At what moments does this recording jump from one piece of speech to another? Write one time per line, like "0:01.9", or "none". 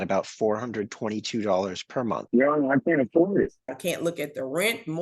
0:02.2
0:03.7